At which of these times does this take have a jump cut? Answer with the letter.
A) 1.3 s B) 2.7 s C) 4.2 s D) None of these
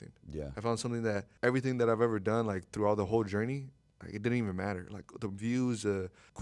A